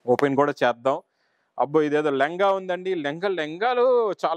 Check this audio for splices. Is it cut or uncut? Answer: uncut